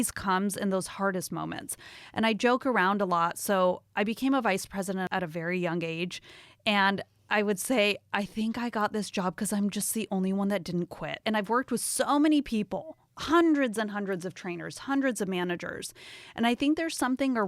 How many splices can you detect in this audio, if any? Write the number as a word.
three